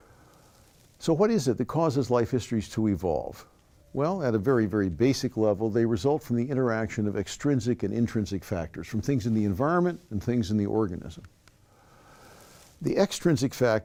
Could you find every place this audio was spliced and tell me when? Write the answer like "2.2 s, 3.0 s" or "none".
none